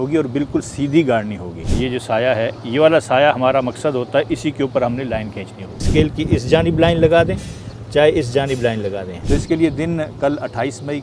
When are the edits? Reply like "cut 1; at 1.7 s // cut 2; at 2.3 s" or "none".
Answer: cut 1; at 1.7 s // cut 2; at 5.8 s // cut 3; at 9.1 s